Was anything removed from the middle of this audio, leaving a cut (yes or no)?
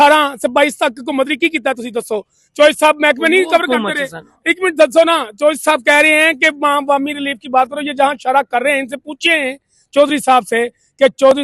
no